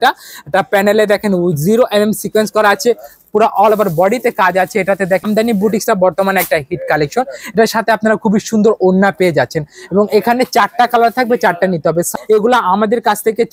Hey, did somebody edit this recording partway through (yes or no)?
yes